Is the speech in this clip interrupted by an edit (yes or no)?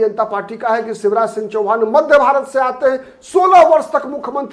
no